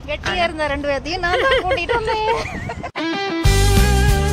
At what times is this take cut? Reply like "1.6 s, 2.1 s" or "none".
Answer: none